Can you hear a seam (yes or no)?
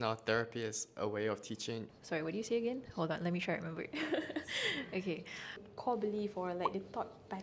yes